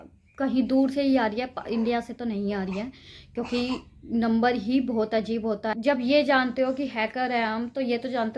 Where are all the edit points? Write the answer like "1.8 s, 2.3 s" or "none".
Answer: 5.7 s